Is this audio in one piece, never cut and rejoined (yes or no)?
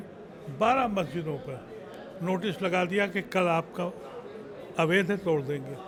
yes